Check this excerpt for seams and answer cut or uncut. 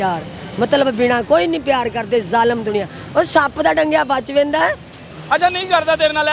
cut